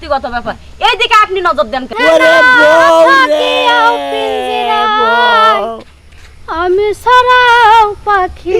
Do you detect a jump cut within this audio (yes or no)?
yes